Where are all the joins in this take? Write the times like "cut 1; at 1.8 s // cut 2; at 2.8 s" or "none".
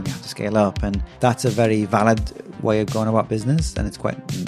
cut 1; at 1.1 s